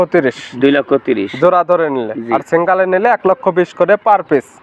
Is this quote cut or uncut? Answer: uncut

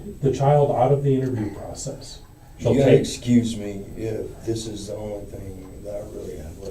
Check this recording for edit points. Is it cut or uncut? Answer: cut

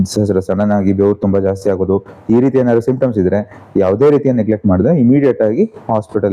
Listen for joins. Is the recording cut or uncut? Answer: uncut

